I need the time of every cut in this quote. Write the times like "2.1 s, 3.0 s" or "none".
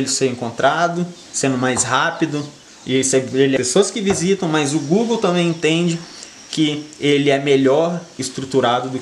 3.6 s